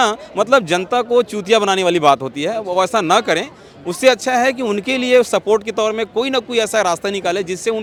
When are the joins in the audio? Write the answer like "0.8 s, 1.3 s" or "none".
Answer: none